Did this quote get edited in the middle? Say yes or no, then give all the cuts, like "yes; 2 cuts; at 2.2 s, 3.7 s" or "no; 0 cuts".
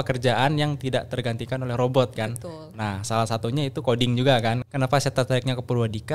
yes; 1 cut; at 4.6 s